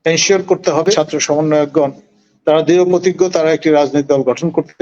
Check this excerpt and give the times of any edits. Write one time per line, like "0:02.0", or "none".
0:01.0